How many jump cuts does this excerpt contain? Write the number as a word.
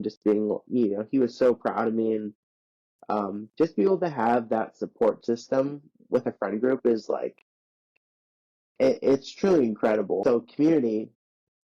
one